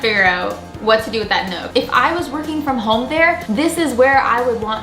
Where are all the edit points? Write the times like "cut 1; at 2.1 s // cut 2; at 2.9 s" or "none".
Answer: cut 1; at 1.7 s